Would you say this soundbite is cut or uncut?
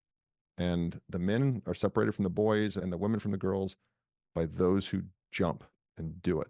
cut